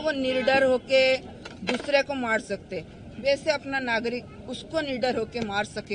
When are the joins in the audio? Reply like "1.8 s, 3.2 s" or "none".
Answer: none